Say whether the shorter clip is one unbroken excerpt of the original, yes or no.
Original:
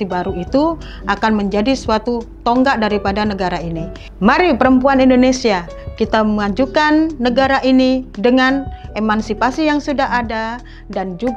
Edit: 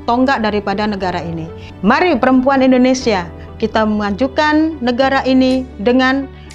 yes